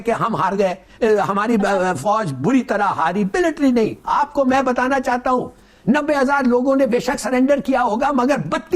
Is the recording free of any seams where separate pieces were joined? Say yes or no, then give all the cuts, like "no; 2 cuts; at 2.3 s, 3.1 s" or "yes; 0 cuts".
yes; 0 cuts